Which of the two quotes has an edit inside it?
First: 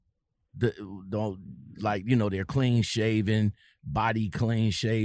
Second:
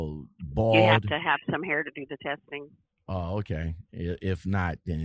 second; 1 cut; at 3.9 s

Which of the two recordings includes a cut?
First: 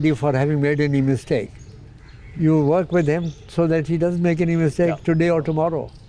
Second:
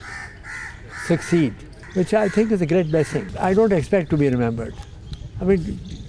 second; 2 cuts; at 1.8 s, 3.2 s

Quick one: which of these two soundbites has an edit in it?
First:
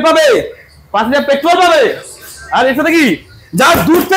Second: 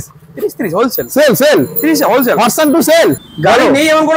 second; 1 cut; at 3.3 s

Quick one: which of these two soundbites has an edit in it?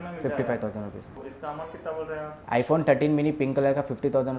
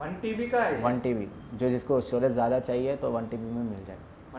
first; 1 cut; at 1.2 s

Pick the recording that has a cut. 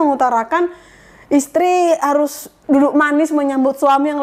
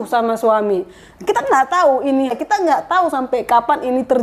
second; 1 cut; at 2.3 s

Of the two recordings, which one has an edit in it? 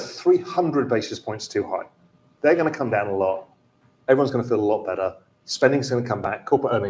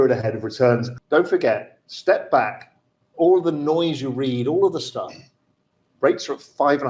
second; 1 cut; at 0.9 s

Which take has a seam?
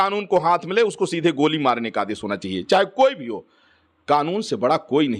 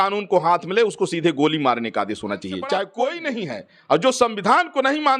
second; 1 cut; at 2.9 s

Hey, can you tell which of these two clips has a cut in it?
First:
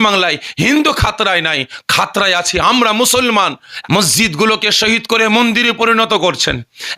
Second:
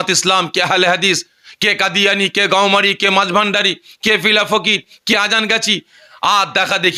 first; 1 cut; at 3.7 s

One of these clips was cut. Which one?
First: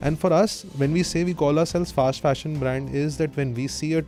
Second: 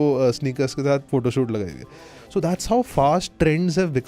second; 2 cuts; at 1.1 s, 3.3 s

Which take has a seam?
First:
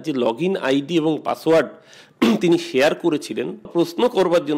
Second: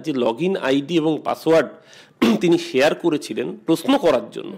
first; 1 cut; at 3.7 s

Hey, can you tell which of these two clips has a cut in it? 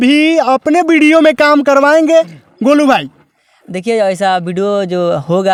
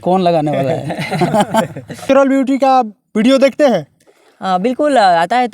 second; 1 cut; at 2.0 s

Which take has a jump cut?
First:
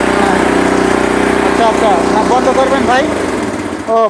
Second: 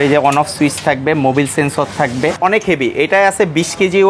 second; 1 cut; at 2.4 s

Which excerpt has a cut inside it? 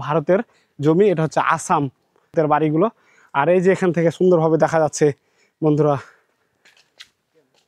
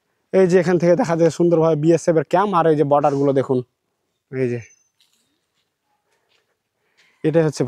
first; 1 cut; at 2.3 s

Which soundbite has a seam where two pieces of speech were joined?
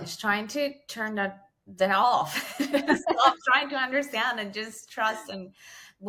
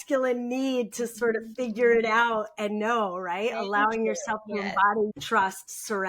second; 1 cut; at 5.2 s

